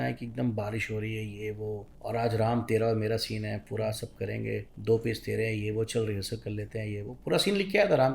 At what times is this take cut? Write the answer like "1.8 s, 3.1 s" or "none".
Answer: 1.9 s, 4.7 s